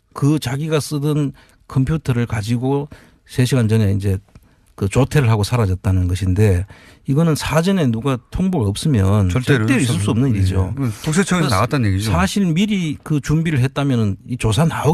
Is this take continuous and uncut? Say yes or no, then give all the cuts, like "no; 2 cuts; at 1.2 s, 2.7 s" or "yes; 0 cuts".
yes; 0 cuts